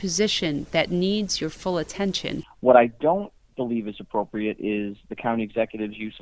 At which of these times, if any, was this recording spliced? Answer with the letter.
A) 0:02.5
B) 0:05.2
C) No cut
A